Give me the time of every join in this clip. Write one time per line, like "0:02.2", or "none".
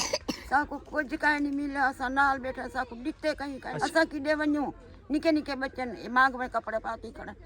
0:03.7